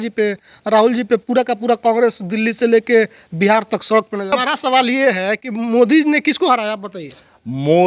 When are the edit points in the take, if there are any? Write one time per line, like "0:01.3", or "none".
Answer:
0:04.3